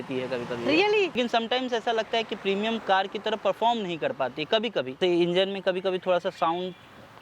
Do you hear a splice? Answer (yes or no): yes